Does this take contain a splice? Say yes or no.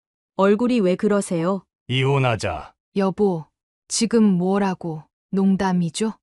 yes